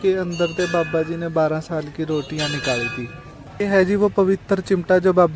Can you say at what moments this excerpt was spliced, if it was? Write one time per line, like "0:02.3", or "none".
0:03.5